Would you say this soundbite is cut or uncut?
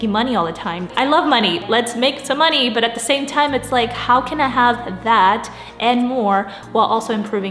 cut